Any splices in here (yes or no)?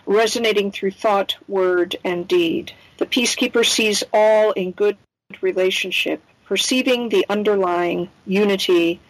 no